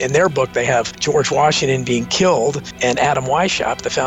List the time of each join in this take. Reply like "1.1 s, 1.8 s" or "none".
0.9 s, 2.7 s